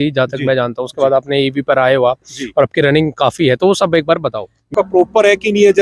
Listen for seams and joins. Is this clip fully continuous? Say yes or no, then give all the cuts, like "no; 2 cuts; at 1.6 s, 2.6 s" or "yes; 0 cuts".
no; 1 cut; at 4.7 s